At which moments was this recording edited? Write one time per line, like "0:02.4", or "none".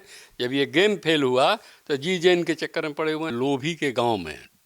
0:03.3